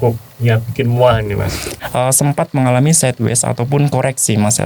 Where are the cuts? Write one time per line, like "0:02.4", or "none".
0:01.7